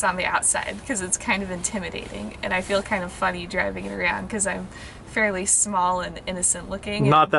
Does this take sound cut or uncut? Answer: uncut